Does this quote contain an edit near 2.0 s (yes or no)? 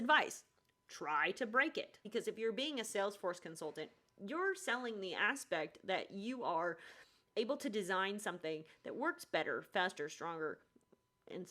yes